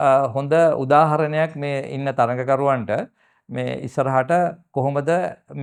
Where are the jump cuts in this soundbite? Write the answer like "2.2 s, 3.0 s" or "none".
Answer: none